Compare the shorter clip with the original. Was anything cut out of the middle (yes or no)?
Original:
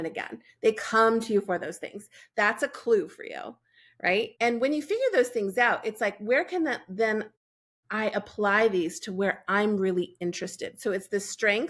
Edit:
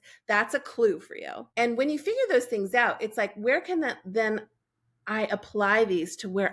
yes